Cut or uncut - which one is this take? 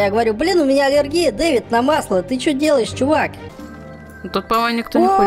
cut